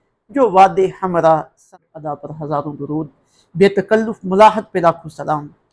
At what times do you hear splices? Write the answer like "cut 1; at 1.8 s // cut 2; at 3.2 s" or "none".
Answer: cut 1; at 1.7 s